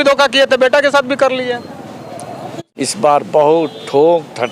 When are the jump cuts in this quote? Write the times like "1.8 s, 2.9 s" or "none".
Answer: 2.5 s